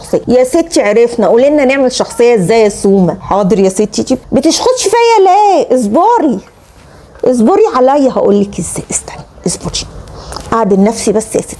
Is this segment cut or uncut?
uncut